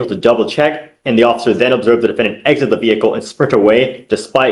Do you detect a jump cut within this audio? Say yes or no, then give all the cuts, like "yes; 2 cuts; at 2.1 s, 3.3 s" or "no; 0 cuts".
no; 0 cuts